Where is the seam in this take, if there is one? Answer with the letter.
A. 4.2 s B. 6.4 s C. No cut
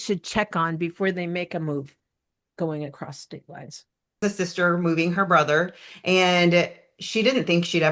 A